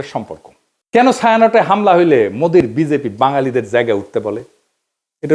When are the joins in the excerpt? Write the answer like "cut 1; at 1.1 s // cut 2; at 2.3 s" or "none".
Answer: none